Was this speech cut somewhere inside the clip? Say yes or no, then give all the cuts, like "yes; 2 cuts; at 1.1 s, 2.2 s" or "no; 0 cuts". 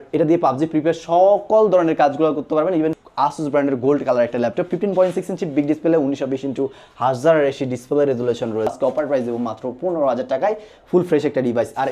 yes; 2 cuts; at 3.0 s, 8.7 s